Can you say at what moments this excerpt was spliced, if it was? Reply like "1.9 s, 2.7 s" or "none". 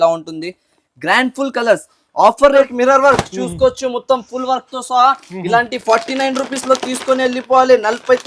2.7 s

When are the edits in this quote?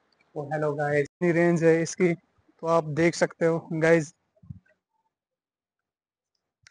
1.1 s

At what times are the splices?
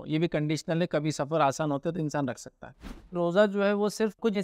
3.2 s

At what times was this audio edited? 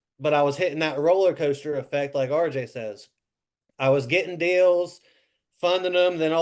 none

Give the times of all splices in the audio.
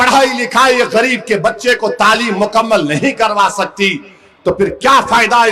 none

